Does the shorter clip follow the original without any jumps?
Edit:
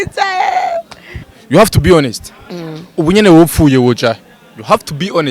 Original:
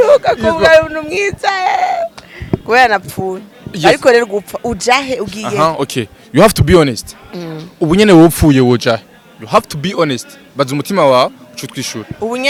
no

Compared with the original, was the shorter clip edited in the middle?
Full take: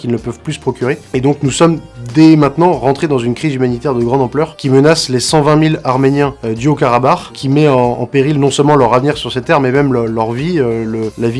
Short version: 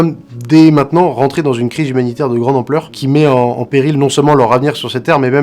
yes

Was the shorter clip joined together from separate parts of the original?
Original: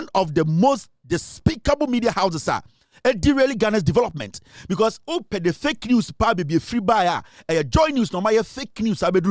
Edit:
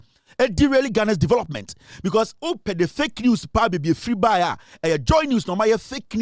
no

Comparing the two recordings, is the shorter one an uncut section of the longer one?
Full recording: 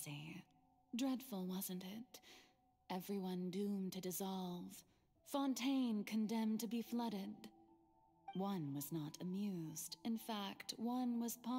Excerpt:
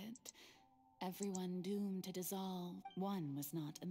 no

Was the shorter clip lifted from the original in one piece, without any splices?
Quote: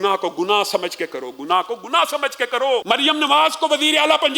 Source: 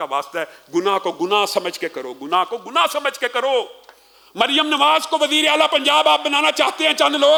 no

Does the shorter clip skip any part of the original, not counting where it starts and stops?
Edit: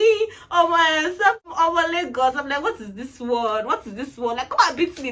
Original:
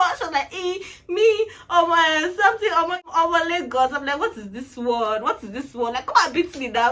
yes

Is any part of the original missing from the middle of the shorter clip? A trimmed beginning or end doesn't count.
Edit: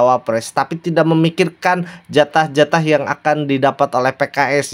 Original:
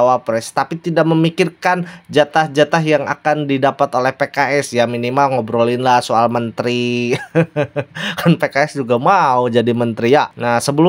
no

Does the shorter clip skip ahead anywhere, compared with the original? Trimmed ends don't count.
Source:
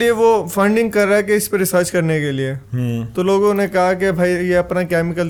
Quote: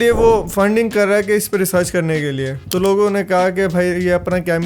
yes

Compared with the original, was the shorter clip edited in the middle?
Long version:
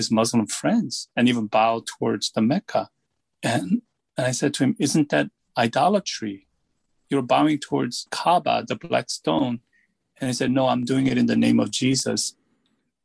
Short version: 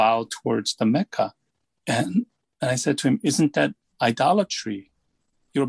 no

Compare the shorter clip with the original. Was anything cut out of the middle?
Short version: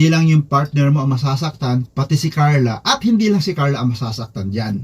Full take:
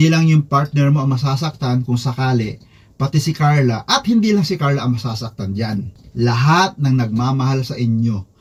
yes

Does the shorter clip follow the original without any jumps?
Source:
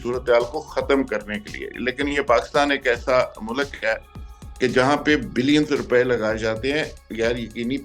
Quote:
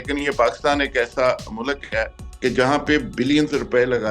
no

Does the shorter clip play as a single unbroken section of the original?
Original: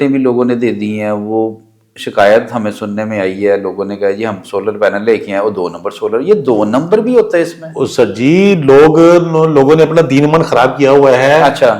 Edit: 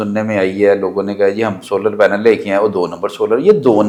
yes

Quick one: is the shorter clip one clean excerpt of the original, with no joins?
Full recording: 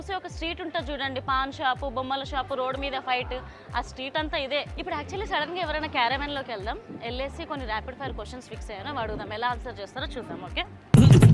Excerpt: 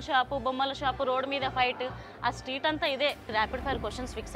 no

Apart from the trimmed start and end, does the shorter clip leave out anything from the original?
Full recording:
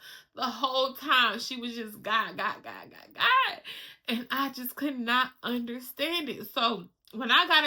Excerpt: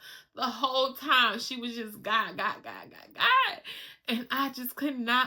no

